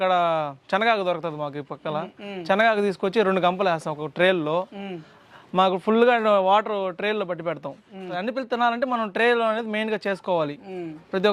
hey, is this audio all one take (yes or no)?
no